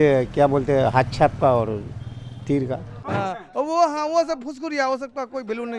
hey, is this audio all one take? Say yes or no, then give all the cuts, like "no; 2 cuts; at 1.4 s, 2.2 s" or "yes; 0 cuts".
no; 1 cut; at 2.9 s